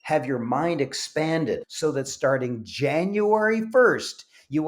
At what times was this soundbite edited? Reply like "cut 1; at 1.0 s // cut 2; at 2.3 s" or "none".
cut 1; at 1.7 s